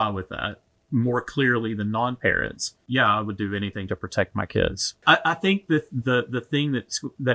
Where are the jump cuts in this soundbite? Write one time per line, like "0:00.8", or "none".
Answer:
0:02.7
0:04.9